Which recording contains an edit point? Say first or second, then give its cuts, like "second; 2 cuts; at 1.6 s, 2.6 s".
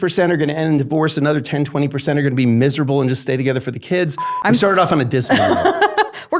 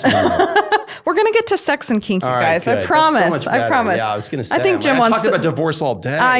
first; 1 cut; at 4.2 s